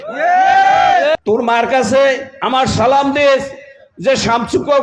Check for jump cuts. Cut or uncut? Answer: cut